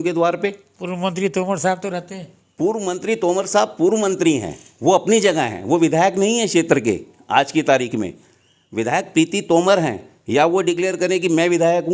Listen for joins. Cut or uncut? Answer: uncut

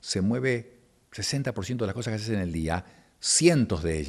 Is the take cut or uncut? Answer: uncut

